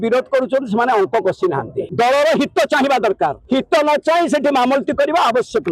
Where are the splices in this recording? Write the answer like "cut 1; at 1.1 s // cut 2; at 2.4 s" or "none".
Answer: cut 1; at 1.9 s // cut 2; at 3.4 s